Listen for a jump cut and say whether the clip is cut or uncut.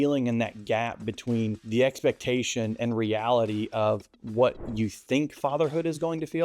cut